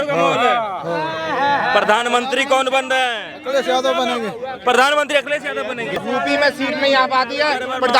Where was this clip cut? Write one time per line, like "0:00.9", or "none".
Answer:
0:06.0